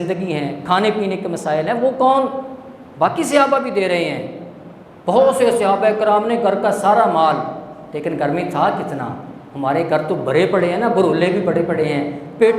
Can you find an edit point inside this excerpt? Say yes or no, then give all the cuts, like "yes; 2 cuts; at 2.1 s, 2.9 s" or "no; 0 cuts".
no; 0 cuts